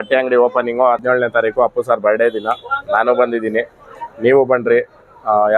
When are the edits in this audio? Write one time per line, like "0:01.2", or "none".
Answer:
0:01.0